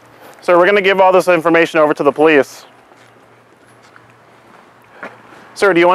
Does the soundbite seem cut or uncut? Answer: uncut